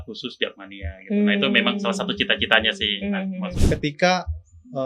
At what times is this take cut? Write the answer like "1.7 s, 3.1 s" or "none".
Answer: 3.6 s